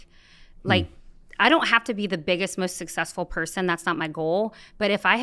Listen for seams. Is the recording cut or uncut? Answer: uncut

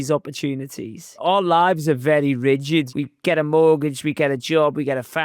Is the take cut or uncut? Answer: cut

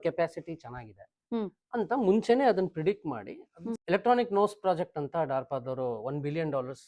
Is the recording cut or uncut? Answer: cut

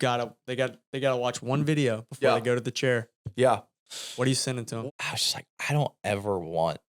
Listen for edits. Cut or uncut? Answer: cut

